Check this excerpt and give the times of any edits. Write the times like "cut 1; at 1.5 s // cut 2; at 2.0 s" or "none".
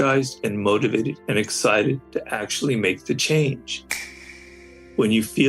cut 1; at 1.2 s // cut 2; at 2.0 s // cut 3; at 4.2 s

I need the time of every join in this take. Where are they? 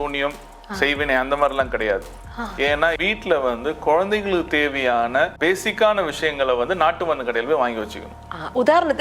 cut 1; at 3.0 s // cut 2; at 5.3 s

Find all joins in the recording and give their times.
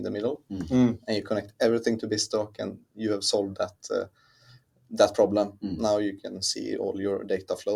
none

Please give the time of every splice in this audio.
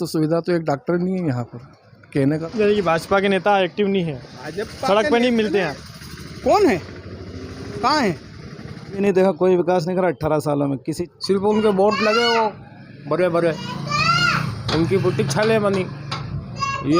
cut 1; at 2.4 s // cut 2; at 9.0 s // cut 3; at 11.0 s

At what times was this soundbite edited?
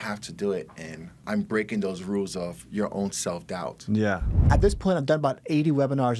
cut 1; at 1.2 s // cut 2; at 4.4 s

